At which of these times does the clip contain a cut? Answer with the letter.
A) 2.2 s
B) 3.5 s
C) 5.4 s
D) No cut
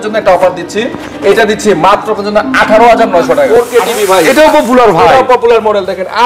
B